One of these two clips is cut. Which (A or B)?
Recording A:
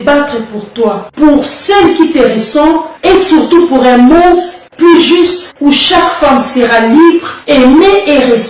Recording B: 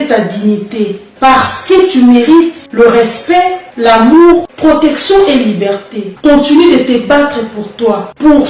B